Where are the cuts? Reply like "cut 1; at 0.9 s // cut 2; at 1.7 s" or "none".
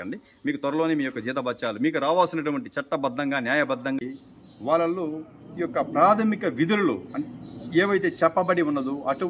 cut 1; at 4.0 s